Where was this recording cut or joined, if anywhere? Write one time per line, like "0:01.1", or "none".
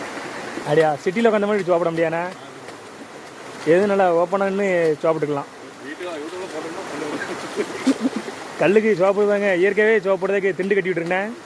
none